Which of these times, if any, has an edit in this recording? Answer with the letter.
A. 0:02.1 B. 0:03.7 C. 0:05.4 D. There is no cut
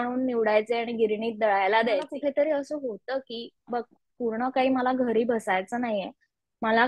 A